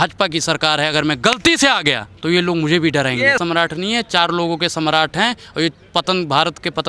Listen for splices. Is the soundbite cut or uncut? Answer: cut